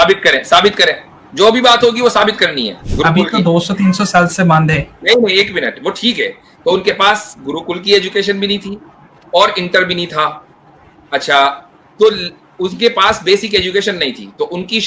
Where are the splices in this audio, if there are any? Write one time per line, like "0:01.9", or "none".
0:02.9

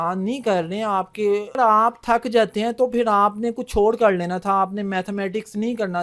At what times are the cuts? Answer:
0:01.6

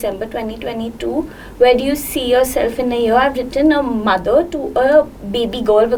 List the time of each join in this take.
none

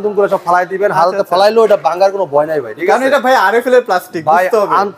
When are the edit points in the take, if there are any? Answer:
none

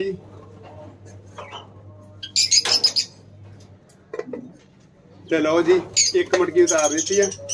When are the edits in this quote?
none

